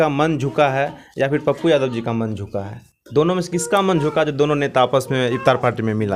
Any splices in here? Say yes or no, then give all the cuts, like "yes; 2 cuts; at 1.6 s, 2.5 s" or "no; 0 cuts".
no; 0 cuts